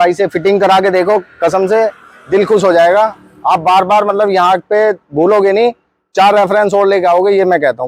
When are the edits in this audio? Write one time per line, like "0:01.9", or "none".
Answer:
none